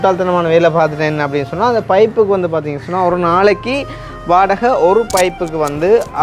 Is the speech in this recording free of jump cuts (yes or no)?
yes